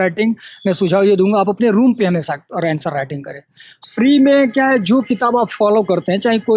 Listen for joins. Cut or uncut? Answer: cut